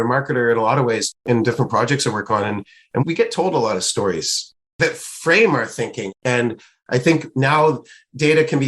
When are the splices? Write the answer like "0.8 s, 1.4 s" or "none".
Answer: 1.2 s, 4.7 s